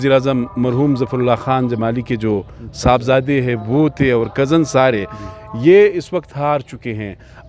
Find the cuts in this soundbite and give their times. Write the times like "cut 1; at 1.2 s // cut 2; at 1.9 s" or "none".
none